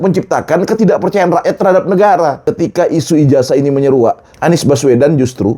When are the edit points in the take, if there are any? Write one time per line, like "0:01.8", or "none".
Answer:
0:02.4
0:04.3